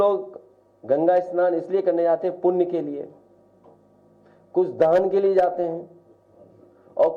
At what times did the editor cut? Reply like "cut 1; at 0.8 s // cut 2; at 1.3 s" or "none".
none